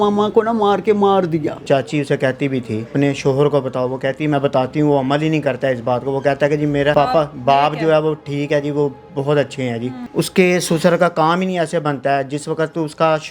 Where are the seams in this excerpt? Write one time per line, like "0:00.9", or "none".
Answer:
0:01.6
0:02.8
0:06.9
0:10.0